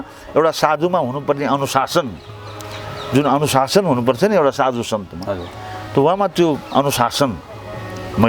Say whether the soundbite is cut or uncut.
uncut